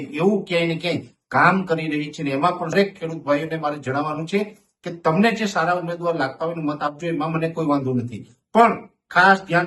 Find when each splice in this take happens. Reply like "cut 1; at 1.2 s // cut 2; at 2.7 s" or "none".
cut 1; at 2.7 s